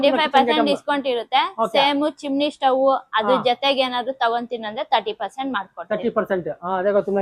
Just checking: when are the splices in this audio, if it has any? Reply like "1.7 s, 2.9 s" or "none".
none